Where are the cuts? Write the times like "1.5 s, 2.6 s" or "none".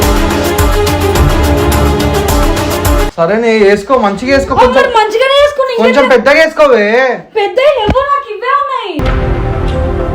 3.1 s